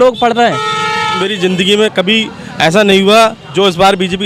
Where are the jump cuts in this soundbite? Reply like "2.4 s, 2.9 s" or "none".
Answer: 1.2 s